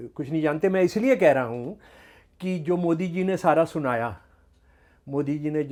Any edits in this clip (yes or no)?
no